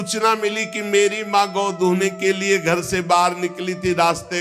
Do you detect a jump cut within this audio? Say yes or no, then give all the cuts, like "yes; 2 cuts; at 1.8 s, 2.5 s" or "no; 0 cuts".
no; 0 cuts